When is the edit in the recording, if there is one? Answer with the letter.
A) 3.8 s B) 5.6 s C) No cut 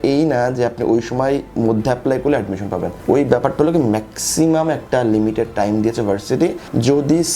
C